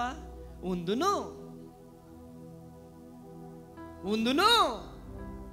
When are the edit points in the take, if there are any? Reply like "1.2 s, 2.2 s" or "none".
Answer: none